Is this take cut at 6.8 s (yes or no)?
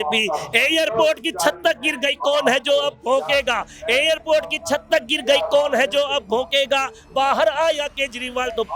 no